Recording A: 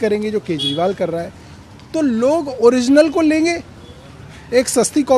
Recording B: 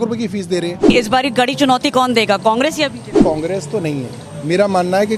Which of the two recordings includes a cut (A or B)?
B